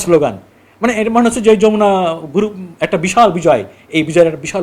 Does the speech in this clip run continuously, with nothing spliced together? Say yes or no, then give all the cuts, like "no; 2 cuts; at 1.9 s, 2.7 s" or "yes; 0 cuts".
yes; 0 cuts